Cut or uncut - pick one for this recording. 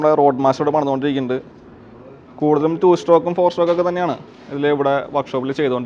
uncut